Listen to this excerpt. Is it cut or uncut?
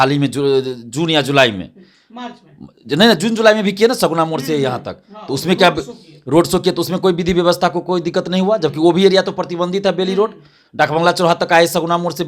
uncut